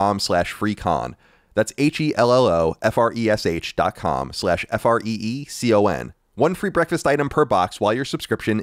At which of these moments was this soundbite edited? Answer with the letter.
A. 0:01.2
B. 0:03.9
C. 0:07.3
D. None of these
D